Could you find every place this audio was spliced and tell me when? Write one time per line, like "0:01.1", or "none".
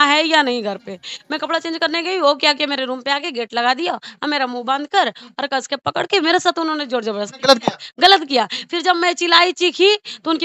none